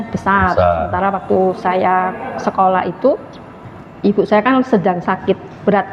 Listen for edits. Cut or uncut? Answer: uncut